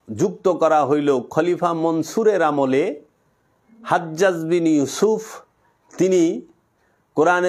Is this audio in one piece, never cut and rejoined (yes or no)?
yes